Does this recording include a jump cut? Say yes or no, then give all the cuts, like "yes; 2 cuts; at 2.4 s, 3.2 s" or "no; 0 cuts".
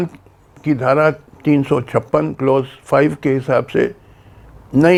no; 0 cuts